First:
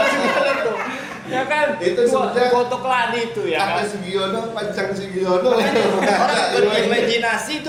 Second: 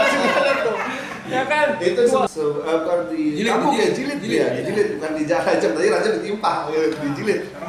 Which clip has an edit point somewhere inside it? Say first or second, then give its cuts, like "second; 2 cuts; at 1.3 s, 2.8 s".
second; 1 cut; at 2.3 s